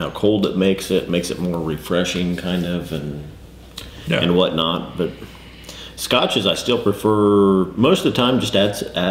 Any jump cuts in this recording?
yes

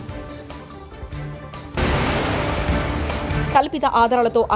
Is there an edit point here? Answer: yes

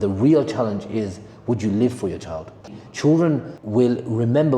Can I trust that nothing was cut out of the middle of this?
no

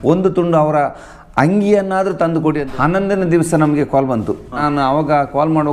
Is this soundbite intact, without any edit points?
no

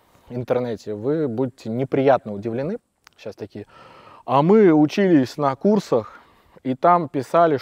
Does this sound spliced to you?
yes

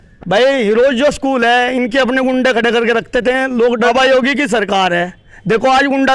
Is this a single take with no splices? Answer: no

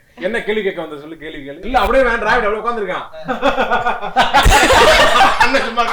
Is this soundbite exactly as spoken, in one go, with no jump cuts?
no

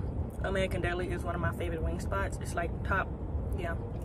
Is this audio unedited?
yes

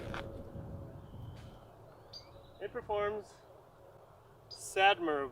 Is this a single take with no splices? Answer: no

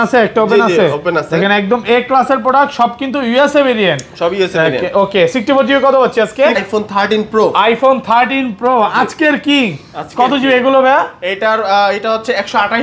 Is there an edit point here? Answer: yes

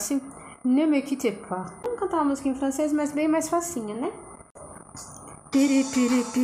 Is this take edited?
yes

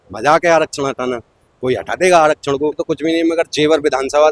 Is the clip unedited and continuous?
no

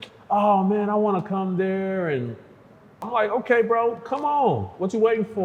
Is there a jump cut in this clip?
yes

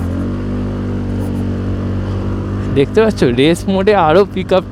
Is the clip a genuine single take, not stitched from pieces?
yes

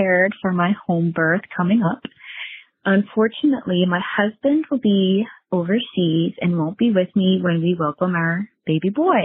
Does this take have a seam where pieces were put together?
no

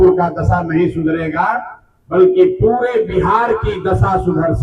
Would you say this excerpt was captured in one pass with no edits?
yes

